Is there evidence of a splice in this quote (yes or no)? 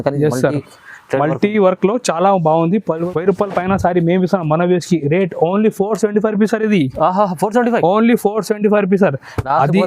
yes